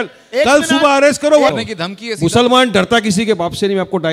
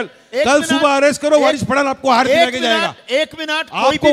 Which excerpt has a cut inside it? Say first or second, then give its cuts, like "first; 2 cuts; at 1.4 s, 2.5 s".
first; 1 cut; at 1.5 s